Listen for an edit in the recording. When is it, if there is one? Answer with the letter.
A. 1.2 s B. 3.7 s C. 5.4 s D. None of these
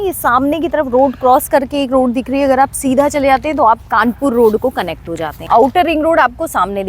C